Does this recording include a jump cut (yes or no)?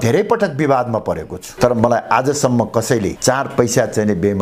no